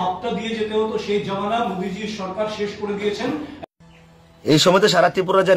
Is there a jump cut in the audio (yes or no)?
yes